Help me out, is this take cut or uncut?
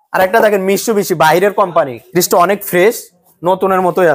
cut